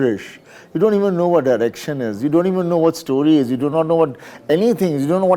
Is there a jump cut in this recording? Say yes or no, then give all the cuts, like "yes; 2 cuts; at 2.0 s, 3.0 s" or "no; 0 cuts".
no; 0 cuts